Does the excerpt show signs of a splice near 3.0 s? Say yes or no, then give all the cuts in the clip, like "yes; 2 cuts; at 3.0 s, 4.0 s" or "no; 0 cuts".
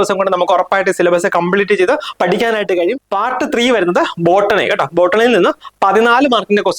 yes; 1 cut; at 3.0 s